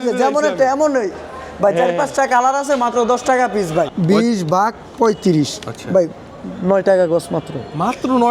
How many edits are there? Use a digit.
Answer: 1